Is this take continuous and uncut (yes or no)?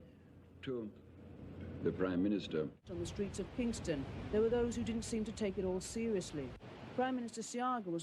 no